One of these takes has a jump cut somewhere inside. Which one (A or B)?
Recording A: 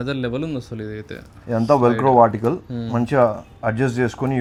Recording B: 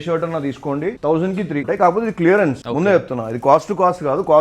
B